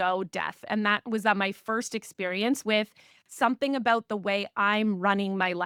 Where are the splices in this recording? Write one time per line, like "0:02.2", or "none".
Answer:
none